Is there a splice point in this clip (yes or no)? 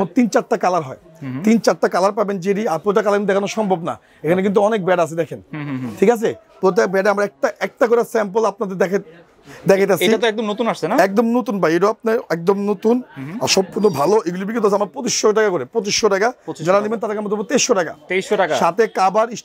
no